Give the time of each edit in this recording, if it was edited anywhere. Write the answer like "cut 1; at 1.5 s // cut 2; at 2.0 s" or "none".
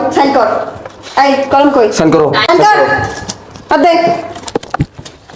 cut 1; at 2.5 s